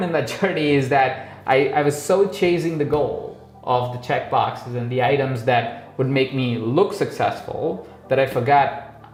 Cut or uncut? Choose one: uncut